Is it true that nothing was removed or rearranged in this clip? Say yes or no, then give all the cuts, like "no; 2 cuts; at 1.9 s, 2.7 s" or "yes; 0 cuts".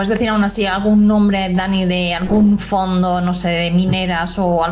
yes; 0 cuts